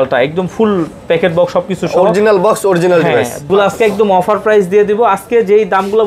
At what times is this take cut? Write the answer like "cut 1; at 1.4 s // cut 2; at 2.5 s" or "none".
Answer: cut 1; at 3.5 s